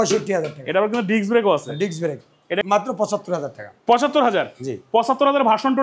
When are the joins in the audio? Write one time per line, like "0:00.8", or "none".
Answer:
0:02.6